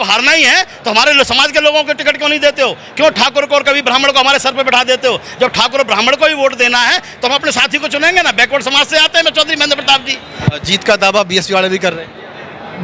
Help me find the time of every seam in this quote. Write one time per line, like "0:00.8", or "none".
0:10.3